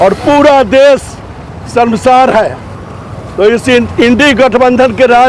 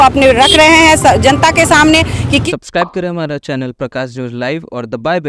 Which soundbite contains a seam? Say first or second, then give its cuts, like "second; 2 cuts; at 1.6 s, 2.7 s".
second; 1 cut; at 2.4 s